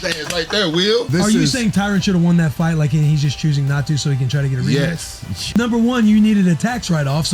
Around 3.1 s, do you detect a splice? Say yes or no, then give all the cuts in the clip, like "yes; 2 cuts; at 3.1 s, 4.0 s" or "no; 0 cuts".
no; 2 cuts; at 1.1 s, 5.6 s